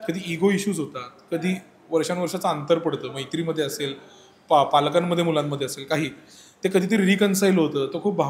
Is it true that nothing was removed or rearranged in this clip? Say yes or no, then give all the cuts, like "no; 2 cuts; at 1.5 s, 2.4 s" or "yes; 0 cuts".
yes; 0 cuts